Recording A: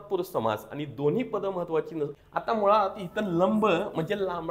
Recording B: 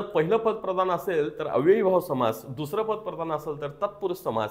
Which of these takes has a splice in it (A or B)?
A